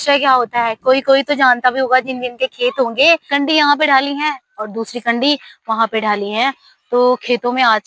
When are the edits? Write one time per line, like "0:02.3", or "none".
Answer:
0:03.3